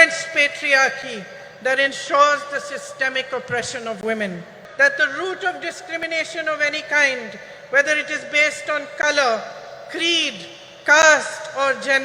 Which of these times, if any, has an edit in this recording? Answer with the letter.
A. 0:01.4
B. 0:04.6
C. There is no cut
B